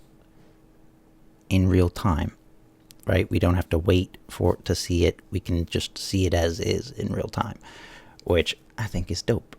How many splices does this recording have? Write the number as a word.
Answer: one